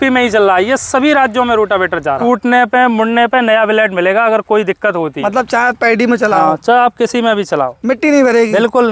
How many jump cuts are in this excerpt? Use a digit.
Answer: 2